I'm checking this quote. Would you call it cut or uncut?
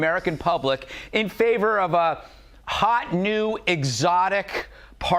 uncut